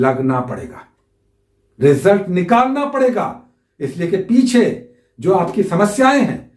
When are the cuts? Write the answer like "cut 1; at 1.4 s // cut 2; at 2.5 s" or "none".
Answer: none